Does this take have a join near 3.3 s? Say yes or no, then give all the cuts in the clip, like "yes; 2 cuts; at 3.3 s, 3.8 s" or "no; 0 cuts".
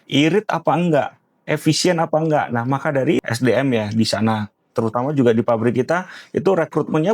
yes; 1 cut; at 3.3 s